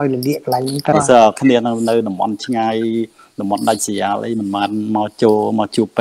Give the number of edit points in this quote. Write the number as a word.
one